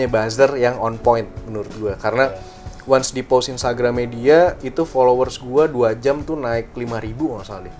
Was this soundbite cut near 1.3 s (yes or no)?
no